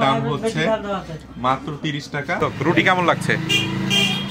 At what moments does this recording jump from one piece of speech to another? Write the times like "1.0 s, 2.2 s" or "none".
2.4 s